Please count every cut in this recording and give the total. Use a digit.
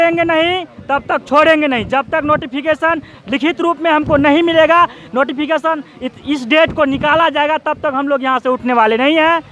0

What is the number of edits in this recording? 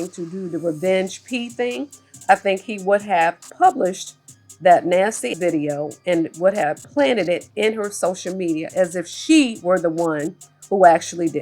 1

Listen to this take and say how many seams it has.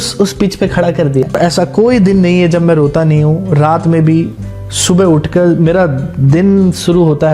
1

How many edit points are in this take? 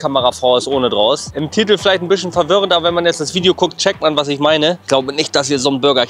0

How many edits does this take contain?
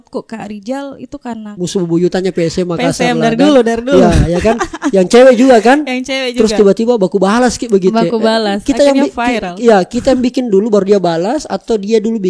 1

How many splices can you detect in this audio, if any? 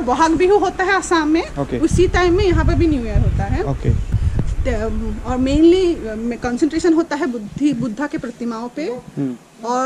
1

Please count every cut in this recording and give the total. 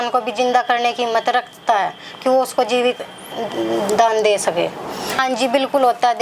1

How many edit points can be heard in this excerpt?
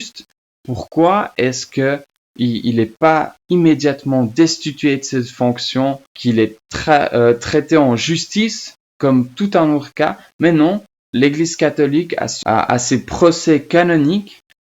1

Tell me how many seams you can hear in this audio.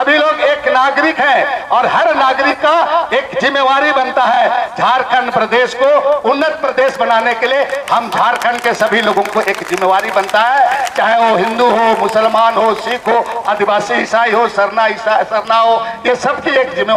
0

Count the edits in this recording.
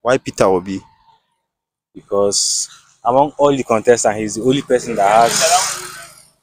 0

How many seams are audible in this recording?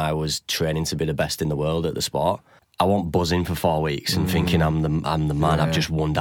1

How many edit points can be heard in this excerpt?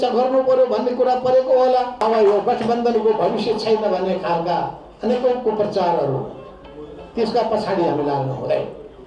1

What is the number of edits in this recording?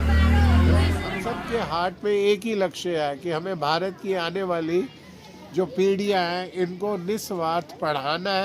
1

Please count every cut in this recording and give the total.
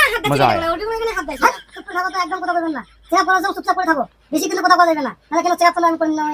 0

